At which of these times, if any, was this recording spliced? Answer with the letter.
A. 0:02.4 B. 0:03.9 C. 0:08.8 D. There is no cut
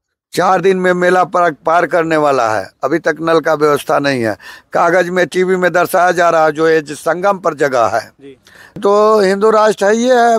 C